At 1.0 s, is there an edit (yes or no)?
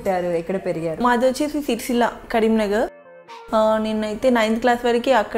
yes